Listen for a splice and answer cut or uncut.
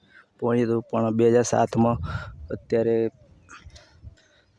uncut